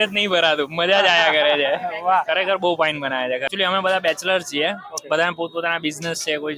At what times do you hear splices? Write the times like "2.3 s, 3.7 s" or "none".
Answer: none